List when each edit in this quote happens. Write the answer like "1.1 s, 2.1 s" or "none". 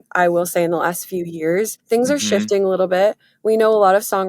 1.8 s